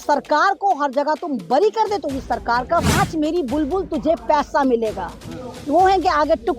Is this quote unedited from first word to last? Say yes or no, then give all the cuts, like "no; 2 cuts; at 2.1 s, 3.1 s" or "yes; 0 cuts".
no; 1 cut; at 2.9 s